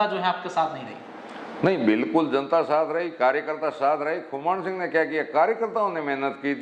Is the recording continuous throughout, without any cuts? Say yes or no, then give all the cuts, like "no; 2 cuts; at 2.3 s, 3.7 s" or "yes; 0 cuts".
yes; 0 cuts